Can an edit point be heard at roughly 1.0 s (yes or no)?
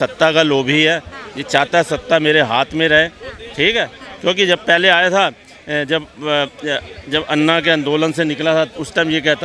no